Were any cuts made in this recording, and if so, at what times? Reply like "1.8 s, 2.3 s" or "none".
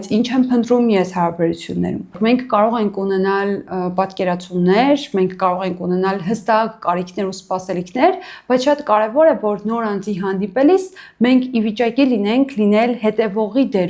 2.2 s